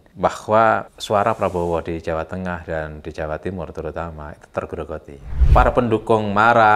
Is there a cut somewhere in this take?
yes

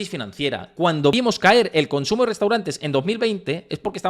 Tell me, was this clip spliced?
yes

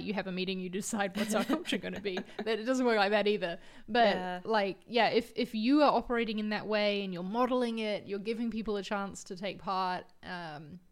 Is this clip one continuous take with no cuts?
yes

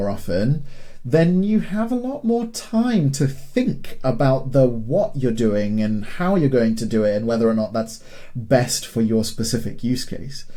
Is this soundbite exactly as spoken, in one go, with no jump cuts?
yes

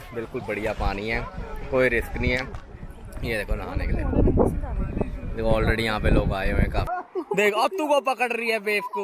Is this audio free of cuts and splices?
no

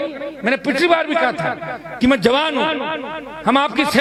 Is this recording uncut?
yes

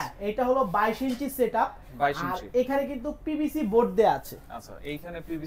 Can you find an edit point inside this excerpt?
no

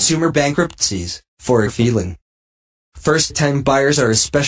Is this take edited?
no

